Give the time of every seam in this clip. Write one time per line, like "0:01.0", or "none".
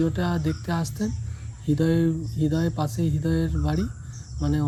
none